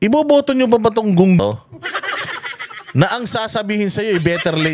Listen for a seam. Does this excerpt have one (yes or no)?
yes